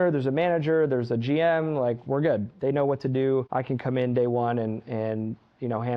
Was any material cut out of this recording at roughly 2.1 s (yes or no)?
no